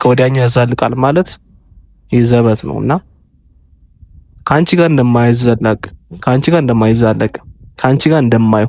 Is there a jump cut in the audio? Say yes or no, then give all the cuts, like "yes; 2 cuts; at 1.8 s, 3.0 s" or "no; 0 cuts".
no; 0 cuts